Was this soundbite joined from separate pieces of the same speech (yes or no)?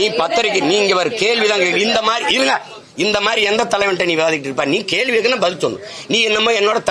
no